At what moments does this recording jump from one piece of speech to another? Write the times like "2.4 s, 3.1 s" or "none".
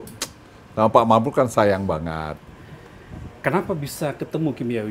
2.5 s